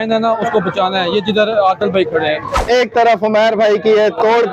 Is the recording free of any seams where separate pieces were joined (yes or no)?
no